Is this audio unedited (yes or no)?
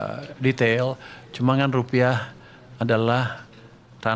yes